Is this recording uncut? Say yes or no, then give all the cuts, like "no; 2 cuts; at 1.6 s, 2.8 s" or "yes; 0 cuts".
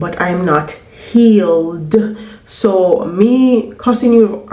yes; 0 cuts